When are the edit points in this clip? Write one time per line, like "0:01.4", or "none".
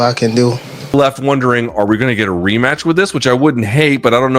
0:00.9